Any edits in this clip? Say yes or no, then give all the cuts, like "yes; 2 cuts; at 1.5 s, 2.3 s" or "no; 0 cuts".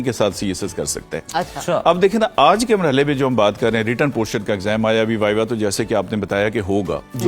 no; 0 cuts